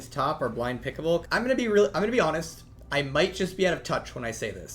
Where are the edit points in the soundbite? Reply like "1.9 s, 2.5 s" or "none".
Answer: 1.3 s